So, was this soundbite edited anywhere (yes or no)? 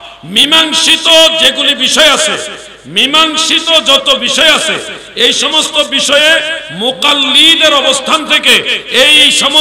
no